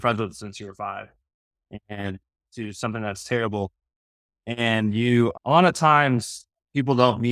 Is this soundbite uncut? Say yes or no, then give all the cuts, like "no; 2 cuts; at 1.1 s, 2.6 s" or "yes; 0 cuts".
yes; 0 cuts